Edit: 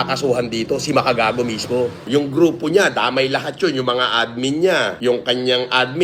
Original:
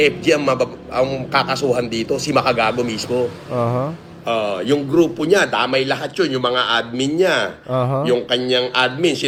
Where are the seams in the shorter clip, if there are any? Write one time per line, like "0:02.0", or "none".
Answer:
0:02.0
0:05.0